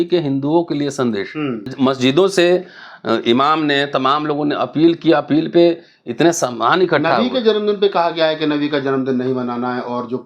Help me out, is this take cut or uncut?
cut